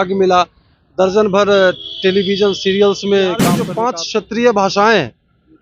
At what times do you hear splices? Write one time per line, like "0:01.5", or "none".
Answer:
0:03.6